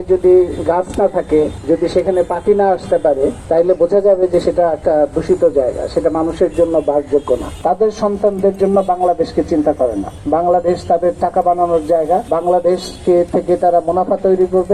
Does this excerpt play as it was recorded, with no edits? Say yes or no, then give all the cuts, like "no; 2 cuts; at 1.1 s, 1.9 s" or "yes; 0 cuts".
no; 5 cuts; at 1.6 s, 3.4 s, 7.5 s, 10.1 s, 12.2 s